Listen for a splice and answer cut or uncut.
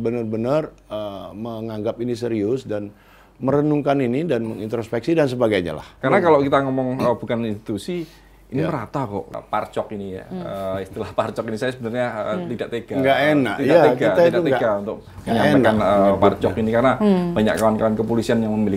cut